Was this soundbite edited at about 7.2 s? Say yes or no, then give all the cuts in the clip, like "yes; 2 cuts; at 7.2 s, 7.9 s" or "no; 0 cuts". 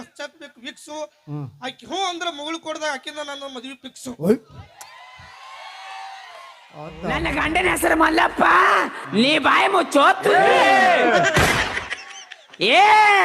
yes; 1 cut; at 7.2 s